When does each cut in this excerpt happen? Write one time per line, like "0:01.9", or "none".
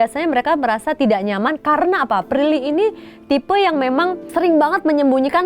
0:04.2